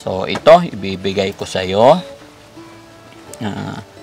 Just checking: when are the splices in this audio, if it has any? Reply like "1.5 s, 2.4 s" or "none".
none